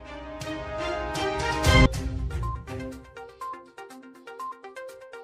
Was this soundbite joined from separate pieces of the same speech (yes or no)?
no